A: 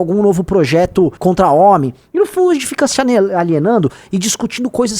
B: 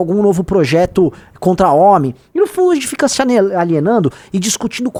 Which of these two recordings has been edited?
A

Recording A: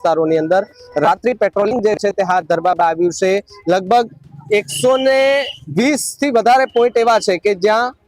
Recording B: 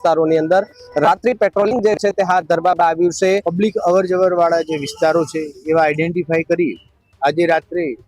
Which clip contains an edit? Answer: B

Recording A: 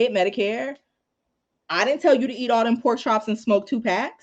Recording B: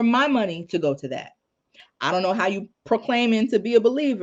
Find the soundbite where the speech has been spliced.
B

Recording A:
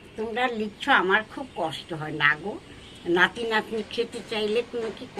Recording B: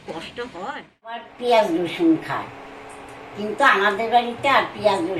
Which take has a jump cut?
B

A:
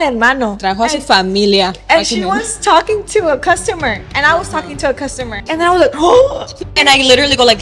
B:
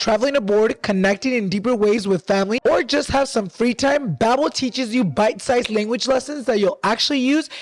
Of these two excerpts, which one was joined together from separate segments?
A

